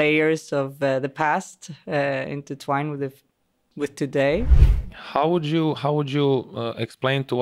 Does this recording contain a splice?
yes; 1 cut; at 4.5 s

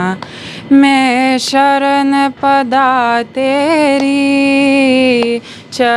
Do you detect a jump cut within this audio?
no; 0 cuts

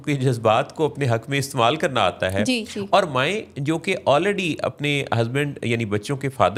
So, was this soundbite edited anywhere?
no; 0 cuts

